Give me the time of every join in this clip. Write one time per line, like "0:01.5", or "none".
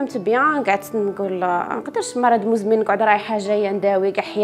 0:01.8